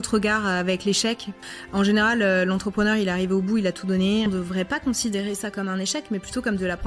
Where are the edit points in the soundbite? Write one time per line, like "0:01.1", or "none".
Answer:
0:01.3
0:04.3